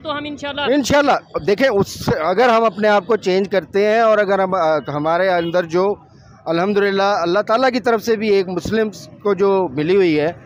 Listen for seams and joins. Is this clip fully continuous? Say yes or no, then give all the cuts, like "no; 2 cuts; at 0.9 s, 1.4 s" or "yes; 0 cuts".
yes; 0 cuts